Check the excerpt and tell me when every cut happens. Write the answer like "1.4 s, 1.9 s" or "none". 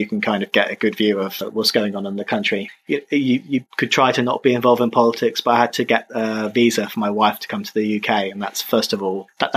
none